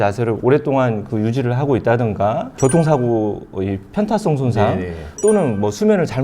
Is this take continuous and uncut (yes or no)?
no